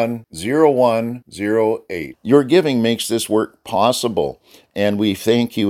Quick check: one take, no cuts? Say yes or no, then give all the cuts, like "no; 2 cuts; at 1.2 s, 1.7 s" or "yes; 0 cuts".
yes; 0 cuts